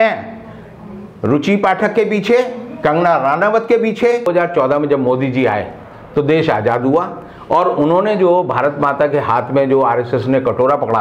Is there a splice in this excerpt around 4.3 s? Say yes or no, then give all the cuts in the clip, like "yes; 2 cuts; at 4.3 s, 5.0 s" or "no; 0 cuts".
yes; 1 cut; at 4.3 s